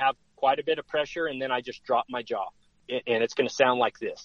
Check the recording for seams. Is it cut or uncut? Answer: cut